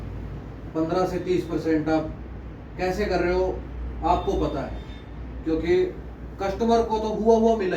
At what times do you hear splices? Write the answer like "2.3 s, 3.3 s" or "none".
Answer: none